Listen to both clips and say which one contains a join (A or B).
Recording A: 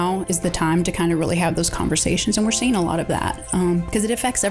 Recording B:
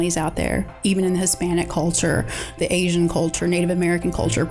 B